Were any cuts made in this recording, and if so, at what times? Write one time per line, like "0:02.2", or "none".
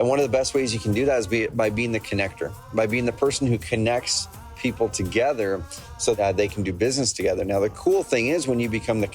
0:06.2